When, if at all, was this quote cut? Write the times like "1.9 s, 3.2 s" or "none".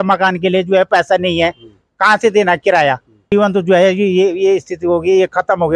3.3 s

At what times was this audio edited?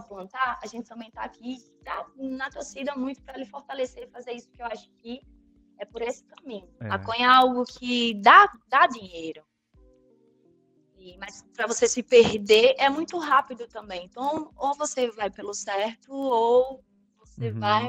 6.7 s

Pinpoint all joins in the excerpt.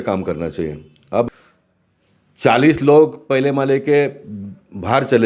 1.3 s

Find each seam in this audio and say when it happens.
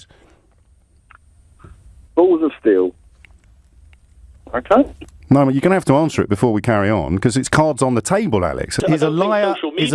8.8 s

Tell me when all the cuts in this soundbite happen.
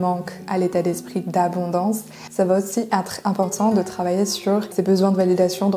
2.2 s, 4.7 s

